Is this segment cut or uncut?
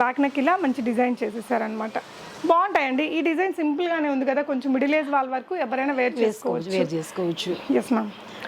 uncut